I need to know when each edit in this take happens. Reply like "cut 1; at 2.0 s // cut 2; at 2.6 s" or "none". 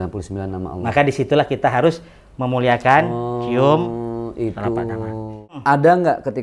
cut 1; at 5.4 s

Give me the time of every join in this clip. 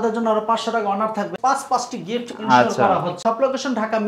cut 1; at 1.3 s // cut 2; at 3.2 s

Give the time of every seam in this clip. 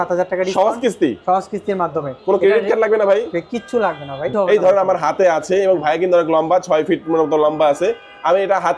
cut 1; at 4.2 s

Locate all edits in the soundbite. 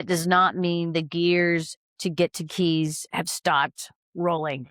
none

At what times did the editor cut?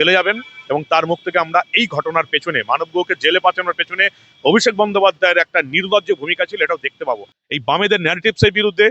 cut 1; at 7.3 s

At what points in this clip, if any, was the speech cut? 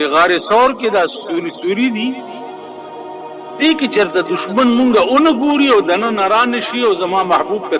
cut 1; at 2.2 s // cut 2; at 3.6 s

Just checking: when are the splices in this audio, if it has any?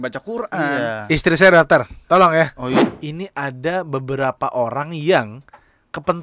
cut 1; at 2.8 s

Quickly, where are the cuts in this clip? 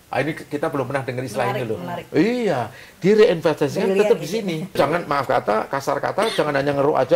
cut 1; at 4.8 s

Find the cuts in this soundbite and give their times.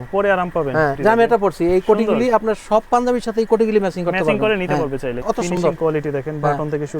cut 1; at 1.0 s // cut 2; at 5.2 s

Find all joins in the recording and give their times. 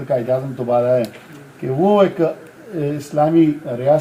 none

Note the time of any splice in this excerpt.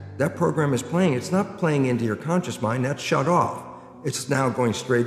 none

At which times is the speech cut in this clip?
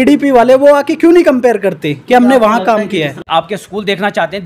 cut 1; at 3.2 s

